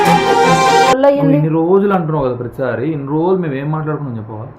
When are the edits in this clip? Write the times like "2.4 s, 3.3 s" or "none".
1.0 s